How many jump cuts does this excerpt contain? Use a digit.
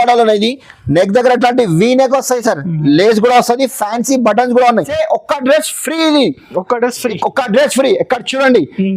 1